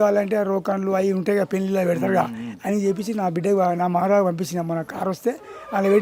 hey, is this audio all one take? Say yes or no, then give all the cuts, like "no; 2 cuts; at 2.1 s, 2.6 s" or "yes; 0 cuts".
yes; 0 cuts